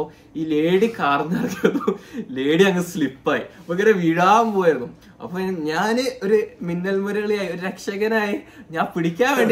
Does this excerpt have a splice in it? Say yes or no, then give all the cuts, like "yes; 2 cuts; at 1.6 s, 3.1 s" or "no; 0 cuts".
no; 0 cuts